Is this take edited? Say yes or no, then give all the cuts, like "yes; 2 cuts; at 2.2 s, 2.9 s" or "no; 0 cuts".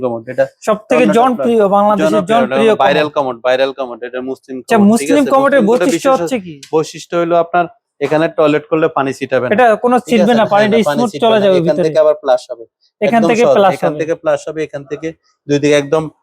no; 0 cuts